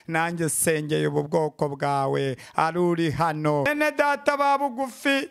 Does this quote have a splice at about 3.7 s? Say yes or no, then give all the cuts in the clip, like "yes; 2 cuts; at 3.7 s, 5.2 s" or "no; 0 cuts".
yes; 1 cut; at 3.7 s